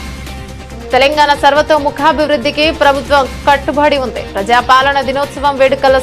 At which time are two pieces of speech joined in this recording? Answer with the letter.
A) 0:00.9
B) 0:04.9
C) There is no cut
A